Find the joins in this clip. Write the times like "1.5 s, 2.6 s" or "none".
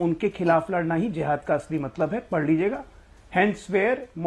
none